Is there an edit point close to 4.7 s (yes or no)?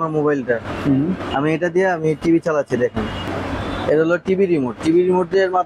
no